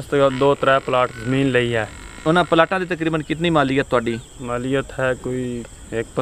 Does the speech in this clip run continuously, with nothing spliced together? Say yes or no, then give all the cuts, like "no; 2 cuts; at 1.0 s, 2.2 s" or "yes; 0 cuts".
yes; 0 cuts